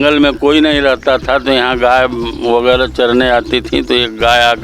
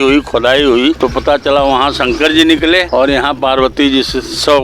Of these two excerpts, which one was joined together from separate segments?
second; 2 cuts; at 1.0 s, 2.9 s

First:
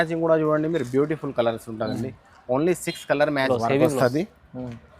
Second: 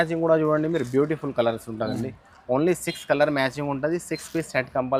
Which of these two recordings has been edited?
first; 1 cut; at 3.5 s

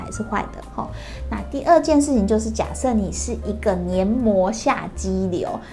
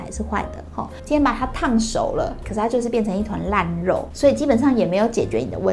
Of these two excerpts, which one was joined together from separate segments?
second; 3 cuts; at 0.9 s, 2.4 s, 4.1 s

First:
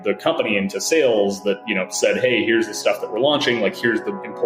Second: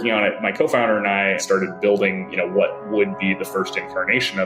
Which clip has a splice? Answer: second; 1 cut; at 1.4 s

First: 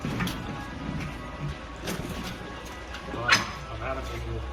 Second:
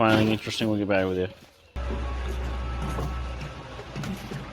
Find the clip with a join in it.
second; 1 cut; at 1.8 s

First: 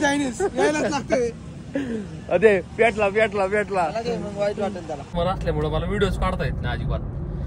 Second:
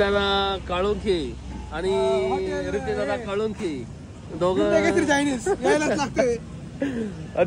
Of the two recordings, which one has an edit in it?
first; 1 cut; at 5.0 s

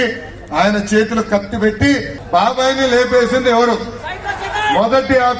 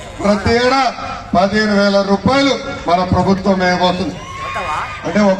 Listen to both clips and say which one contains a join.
first; 1 cut; at 2.1 s

